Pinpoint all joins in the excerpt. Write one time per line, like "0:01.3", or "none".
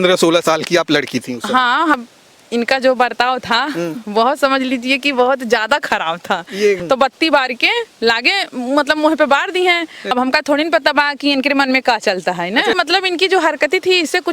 0:02.0
0:06.8
0:10.0
0:12.7